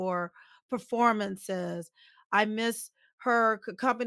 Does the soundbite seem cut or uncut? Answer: uncut